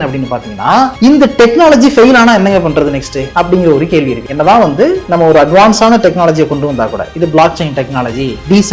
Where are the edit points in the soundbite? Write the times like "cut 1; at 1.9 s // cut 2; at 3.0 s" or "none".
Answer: none